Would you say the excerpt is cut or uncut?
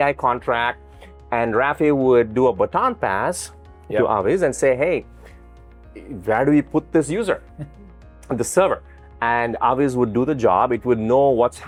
uncut